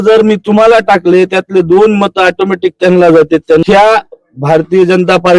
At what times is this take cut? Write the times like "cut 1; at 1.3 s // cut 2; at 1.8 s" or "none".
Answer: cut 1; at 3.6 s

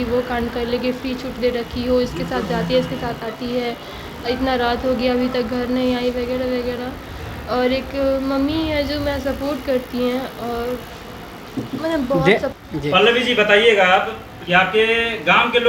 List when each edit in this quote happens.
cut 1; at 12.5 s

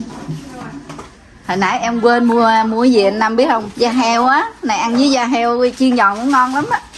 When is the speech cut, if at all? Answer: none

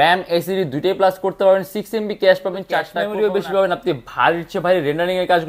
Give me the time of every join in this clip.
cut 1; at 3.0 s

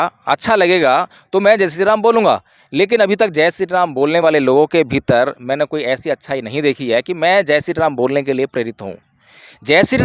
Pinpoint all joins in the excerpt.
none

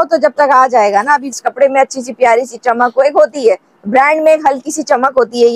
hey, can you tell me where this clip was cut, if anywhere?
cut 1; at 1.3 s

